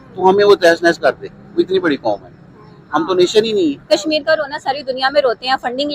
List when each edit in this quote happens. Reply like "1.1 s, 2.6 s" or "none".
3.8 s